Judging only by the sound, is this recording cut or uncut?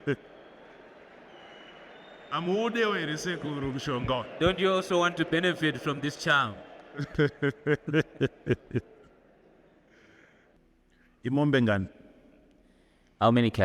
cut